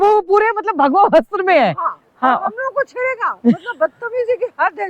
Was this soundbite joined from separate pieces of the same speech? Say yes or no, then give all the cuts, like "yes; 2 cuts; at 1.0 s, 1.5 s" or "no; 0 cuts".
no; 0 cuts